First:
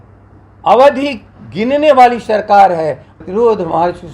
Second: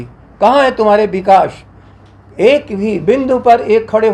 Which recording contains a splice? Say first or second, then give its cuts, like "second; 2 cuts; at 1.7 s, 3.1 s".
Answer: first; 1 cut; at 3.1 s